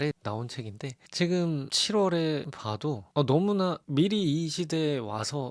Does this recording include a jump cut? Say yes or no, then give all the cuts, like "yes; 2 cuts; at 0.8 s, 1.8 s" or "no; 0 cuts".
no; 0 cuts